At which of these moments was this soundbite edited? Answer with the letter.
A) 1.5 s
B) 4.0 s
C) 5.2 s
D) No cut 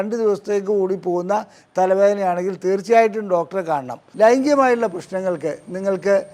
B